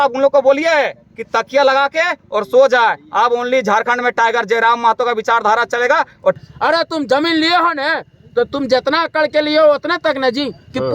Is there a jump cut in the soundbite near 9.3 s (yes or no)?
no